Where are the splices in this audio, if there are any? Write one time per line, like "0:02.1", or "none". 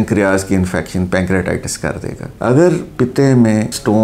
0:02.4

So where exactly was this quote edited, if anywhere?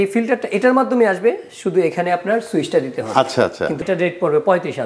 0:03.8

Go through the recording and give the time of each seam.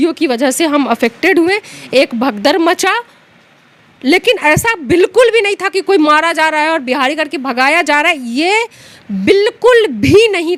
none

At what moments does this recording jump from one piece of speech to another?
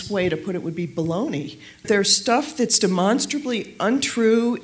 0:01.8

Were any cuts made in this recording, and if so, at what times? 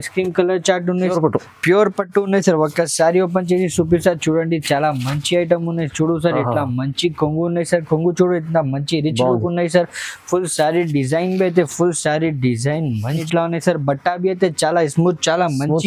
0:01.0
0:13.2

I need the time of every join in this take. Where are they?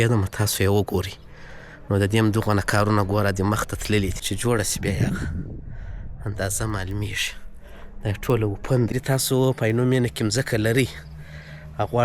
0:04.3
0:08.9

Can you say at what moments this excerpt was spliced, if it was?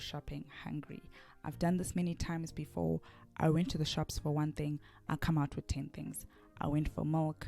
0:02.3

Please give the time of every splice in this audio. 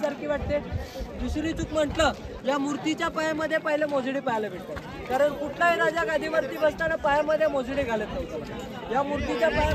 none

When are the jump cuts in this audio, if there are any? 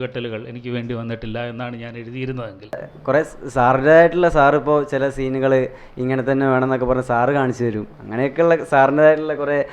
0:02.9

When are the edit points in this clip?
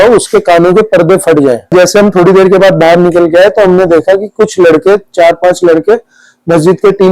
0:01.7

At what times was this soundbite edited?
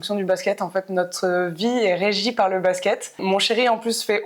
0:03.2

